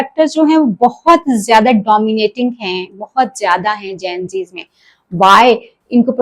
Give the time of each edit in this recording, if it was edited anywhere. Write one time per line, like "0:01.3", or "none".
none

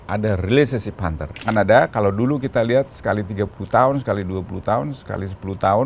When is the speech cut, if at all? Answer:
0:01.3

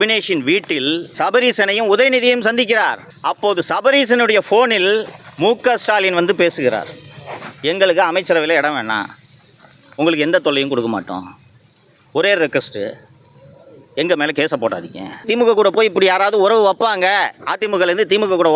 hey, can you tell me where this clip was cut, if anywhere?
0:01.1
0:03.1
0:05.2
0:15.2

